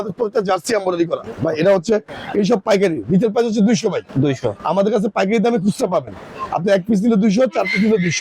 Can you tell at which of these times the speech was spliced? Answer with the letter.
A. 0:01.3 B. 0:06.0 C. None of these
A